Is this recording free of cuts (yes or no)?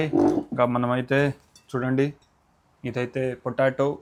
yes